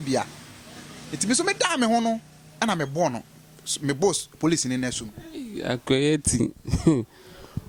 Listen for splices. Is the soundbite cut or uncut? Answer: uncut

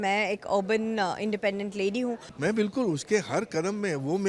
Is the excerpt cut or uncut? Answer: cut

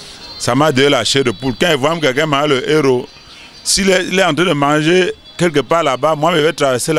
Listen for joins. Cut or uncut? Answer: uncut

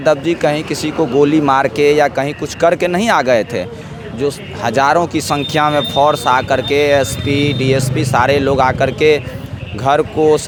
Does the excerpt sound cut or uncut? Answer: uncut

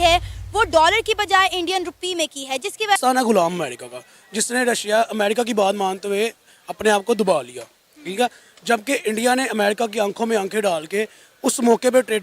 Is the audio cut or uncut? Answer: cut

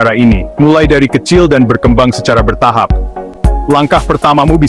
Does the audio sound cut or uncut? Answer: uncut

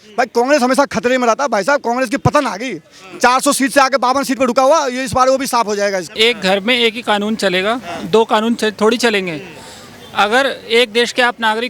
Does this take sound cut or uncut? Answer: cut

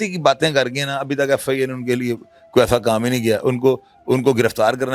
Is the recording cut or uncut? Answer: uncut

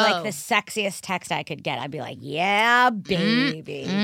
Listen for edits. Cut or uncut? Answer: uncut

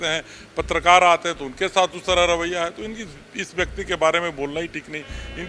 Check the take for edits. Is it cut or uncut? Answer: uncut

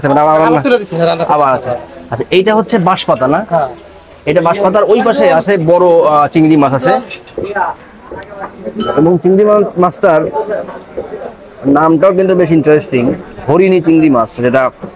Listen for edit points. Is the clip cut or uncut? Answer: cut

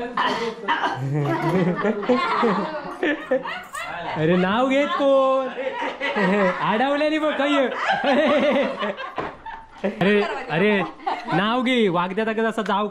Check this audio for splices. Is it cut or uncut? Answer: cut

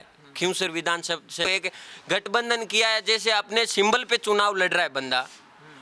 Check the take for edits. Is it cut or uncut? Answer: cut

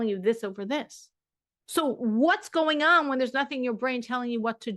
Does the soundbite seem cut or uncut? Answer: uncut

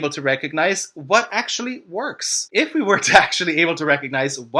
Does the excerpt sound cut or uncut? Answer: cut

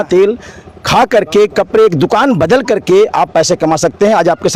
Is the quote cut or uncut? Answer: uncut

